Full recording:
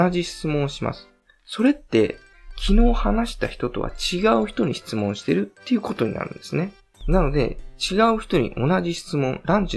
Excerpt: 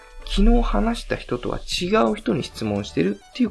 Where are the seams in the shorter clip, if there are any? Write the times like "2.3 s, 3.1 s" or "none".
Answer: none